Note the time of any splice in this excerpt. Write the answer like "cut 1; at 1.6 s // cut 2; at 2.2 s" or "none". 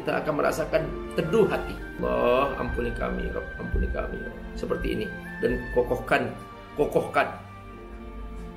cut 1; at 1.9 s